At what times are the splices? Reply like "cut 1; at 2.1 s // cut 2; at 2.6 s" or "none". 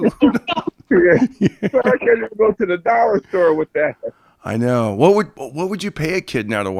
none